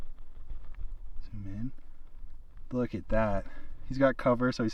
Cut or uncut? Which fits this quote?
uncut